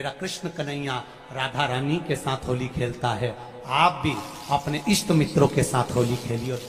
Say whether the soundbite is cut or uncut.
uncut